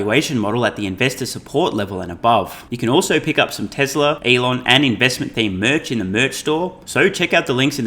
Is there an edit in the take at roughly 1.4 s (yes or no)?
no